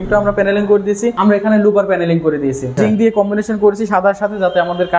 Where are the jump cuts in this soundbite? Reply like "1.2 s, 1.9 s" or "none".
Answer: 1.2 s, 2.8 s